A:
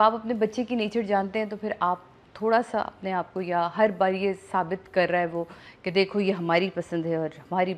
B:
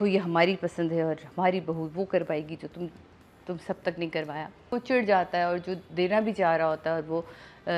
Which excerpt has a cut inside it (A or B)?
B